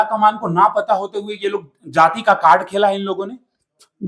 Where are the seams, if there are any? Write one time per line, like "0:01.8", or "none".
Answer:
none